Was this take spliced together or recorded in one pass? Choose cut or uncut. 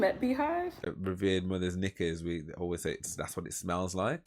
cut